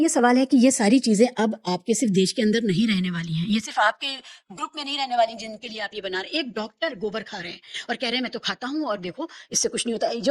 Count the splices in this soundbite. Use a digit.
0